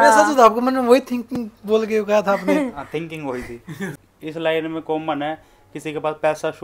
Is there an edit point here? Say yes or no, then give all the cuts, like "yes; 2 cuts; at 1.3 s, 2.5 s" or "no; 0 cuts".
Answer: yes; 1 cut; at 4.0 s